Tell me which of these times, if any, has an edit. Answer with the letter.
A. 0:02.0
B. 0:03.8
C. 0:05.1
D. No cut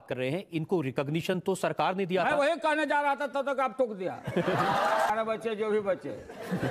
C